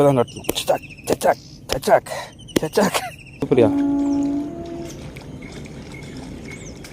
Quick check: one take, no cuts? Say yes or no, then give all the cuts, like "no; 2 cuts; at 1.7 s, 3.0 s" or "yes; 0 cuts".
no; 1 cut; at 3.5 s